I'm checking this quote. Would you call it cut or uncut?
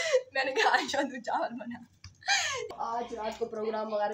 cut